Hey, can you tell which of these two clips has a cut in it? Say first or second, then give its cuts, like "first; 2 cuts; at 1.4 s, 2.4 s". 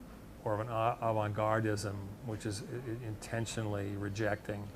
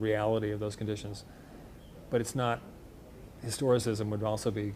second; 1 cut; at 1.1 s